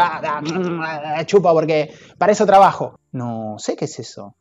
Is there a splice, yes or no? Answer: yes